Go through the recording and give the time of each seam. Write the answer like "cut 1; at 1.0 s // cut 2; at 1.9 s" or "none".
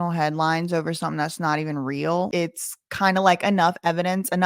cut 1; at 2.3 s